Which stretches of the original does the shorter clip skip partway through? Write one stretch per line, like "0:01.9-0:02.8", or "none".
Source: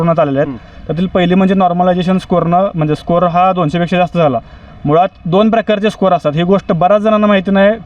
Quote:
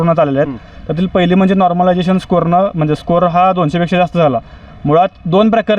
none